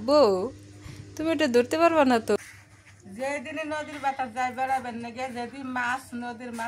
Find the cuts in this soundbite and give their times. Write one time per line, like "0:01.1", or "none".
0:02.4